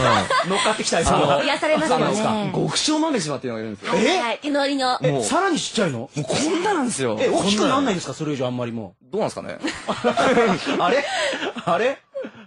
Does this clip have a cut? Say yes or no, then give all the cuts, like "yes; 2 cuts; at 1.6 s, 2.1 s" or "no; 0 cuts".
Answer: yes; 1 cut; at 6.8 s